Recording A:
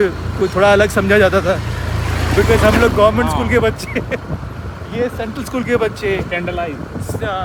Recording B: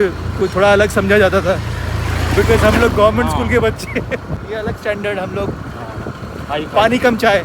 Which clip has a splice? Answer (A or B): B